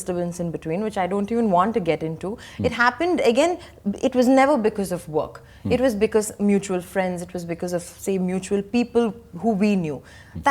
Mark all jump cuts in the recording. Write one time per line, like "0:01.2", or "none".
none

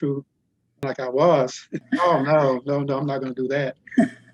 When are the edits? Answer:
0:00.8
0:01.8

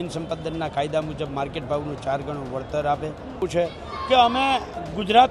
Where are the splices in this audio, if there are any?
0:03.4

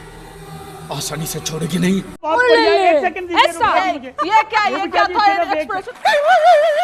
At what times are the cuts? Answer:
0:02.2
0:05.8

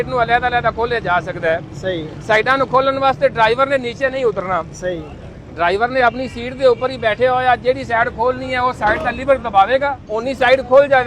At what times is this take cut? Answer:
0:10.1

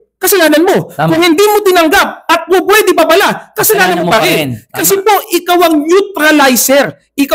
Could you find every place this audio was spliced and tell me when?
none

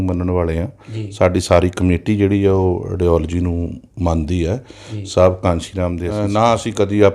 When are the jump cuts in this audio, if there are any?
0:06.1

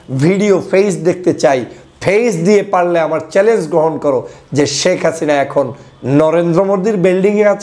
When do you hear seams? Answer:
none

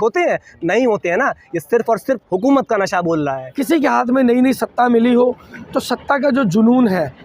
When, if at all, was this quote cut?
0:03.4

